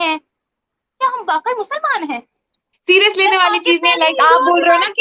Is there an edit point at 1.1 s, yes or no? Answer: no